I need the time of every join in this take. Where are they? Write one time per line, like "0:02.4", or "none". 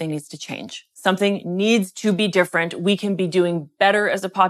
none